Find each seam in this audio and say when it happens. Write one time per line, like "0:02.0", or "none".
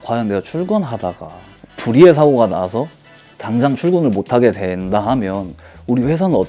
none

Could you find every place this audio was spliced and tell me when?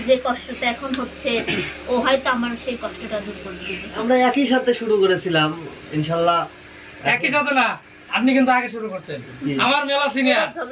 0:04.0

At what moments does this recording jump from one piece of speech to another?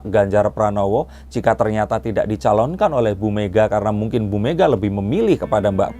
none

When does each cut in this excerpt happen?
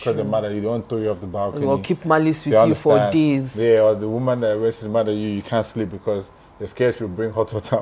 none

